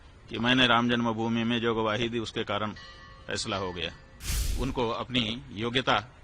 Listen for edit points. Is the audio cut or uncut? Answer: cut